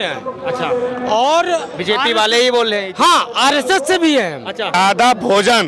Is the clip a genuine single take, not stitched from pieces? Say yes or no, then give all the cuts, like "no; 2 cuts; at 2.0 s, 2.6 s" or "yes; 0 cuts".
no; 1 cut; at 4.7 s